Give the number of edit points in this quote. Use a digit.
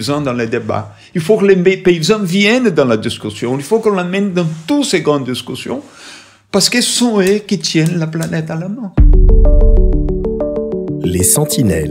1